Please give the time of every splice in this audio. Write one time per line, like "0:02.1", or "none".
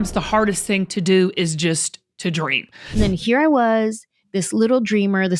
0:02.8